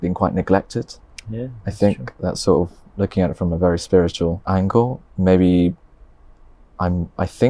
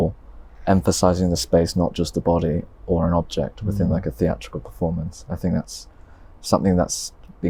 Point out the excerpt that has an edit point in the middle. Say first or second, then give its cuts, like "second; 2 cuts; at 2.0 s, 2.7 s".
first; 1 cut; at 4.4 s